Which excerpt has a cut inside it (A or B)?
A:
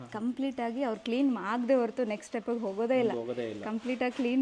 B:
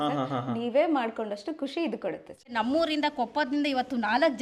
B